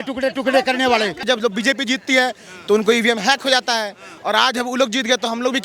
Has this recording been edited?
yes; 1 cut; at 1.2 s

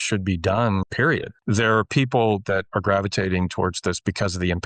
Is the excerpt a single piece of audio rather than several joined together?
no; 2 cuts; at 0.9 s, 2.7 s

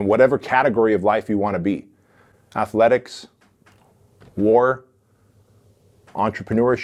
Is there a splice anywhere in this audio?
no; 0 cuts

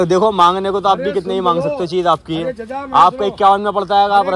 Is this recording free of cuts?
yes; 0 cuts

